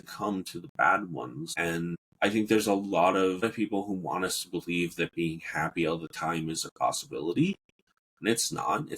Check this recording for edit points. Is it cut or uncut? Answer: cut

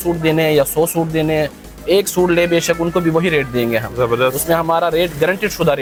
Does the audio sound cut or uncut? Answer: uncut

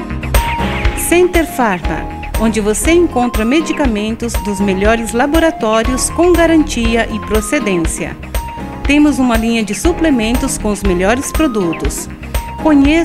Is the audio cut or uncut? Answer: cut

